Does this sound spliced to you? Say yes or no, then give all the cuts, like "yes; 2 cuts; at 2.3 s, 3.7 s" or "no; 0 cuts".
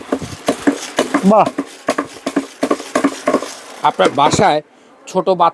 no; 0 cuts